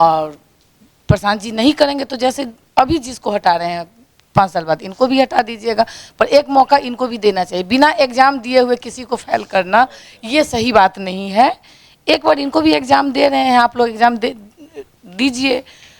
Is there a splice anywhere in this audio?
no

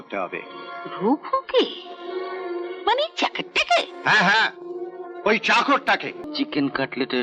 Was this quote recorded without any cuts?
no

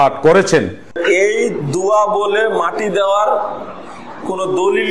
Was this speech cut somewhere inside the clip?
yes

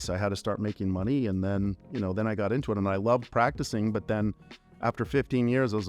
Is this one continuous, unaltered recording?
no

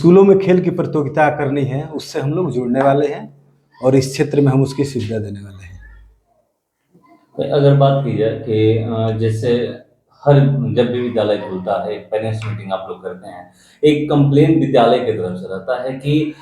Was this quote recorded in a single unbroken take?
yes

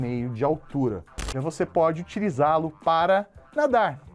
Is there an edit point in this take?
yes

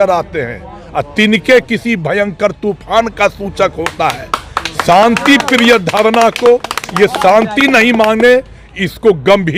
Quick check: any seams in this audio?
no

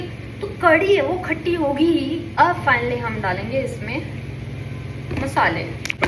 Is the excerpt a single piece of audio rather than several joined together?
yes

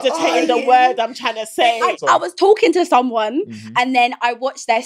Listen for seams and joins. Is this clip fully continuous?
no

